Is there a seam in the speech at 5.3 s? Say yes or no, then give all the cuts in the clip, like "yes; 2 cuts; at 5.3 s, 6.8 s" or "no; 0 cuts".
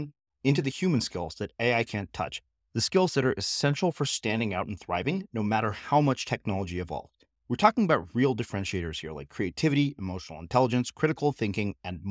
no; 0 cuts